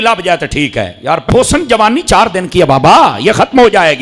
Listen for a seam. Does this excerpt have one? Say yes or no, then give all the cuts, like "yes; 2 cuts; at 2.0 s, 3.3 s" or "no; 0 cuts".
yes; 1 cut; at 1.3 s